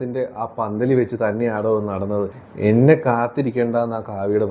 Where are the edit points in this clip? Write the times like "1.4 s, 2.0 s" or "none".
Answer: 2.4 s

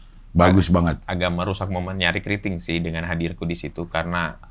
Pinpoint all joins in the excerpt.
1.0 s

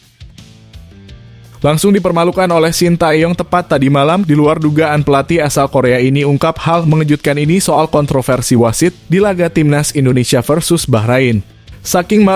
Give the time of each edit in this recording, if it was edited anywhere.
1.6 s

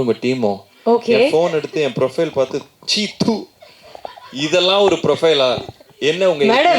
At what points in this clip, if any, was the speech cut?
none

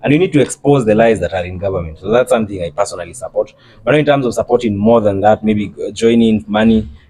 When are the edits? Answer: none

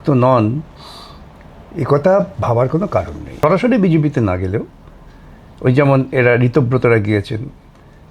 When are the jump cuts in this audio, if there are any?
3.2 s

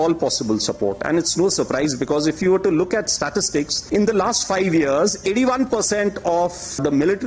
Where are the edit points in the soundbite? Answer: none

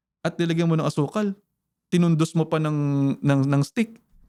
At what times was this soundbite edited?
none

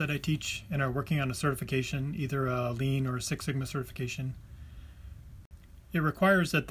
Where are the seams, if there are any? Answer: 5.5 s

